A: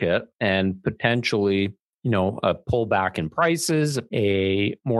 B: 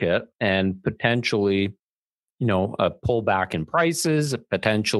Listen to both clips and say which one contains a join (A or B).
A